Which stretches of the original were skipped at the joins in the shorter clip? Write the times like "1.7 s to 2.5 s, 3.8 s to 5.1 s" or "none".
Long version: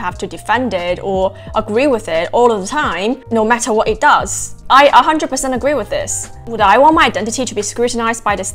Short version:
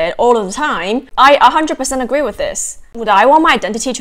3.2 s to 4.6 s